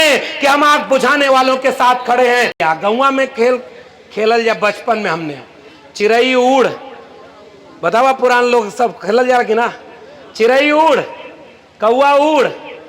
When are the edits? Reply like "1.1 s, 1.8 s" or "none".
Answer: 2.6 s